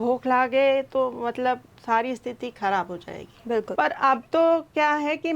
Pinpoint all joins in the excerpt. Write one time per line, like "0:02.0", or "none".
0:03.7

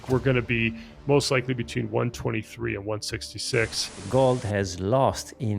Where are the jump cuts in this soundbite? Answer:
0:04.0

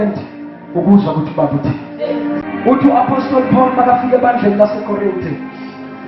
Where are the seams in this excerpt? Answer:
0:02.4

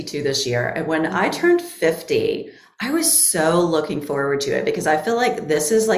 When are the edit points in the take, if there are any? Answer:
none

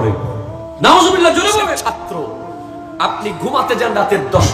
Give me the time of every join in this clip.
0:01.8

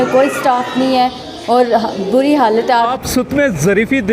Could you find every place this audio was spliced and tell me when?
0:03.0

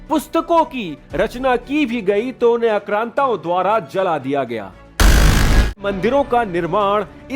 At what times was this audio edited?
0:05.8

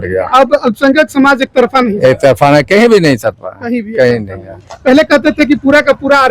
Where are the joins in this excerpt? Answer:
none

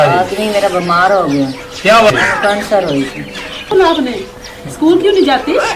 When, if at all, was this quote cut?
0:02.1
0:03.7

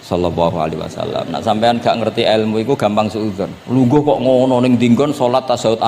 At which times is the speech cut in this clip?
0:03.5

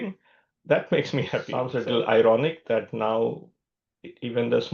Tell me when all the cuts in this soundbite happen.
0:01.6

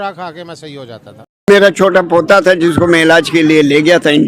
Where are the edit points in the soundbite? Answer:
0:01.5

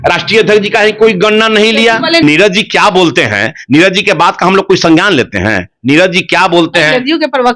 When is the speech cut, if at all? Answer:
0:02.2

